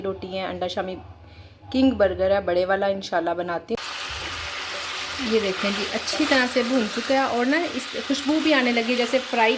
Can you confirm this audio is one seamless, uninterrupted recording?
no; 1 cut; at 3.7 s

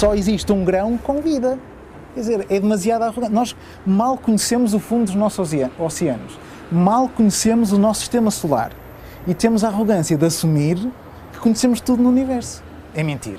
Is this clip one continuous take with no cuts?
yes; 0 cuts

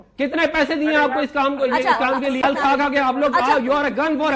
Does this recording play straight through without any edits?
no; 1 cut; at 2.4 s

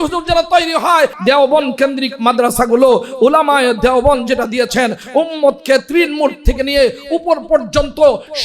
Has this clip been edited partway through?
yes; 1 cut; at 1.2 s

